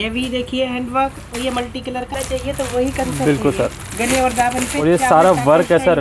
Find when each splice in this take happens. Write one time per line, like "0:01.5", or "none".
0:02.1

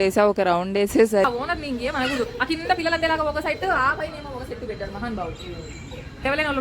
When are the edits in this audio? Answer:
0:01.3

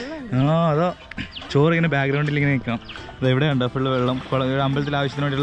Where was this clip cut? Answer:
none

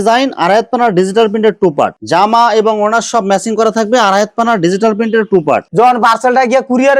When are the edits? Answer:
0:02.0
0:05.7

